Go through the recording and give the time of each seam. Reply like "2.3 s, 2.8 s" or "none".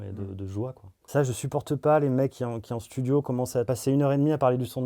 0.9 s, 3.7 s

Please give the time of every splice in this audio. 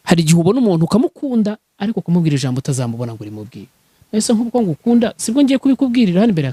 none

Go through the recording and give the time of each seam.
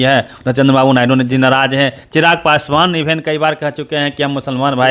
none

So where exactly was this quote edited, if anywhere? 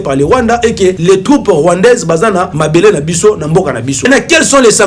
1.0 s, 2.5 s, 4.1 s

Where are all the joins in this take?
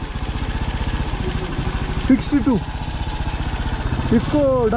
none

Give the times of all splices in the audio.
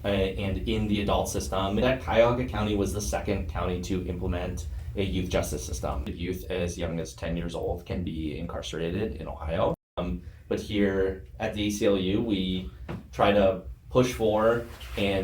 1.8 s, 6.1 s, 10.0 s

